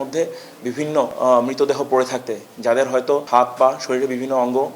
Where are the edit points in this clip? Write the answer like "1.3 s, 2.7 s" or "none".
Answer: none